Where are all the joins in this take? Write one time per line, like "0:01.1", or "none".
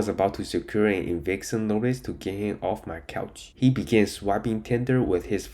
0:03.4